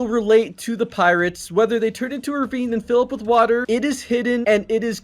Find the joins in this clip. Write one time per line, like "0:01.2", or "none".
0:04.0